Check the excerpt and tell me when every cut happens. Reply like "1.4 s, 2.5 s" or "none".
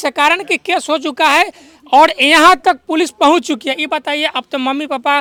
none